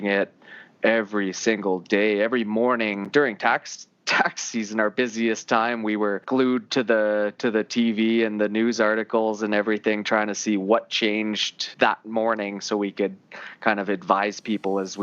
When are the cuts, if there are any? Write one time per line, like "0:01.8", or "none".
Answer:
0:03.0
0:06.2
0:11.6